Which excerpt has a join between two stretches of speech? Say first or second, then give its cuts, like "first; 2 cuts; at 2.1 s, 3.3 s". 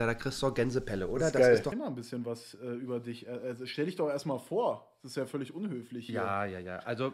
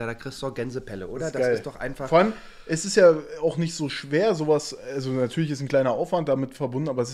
first; 1 cut; at 1.7 s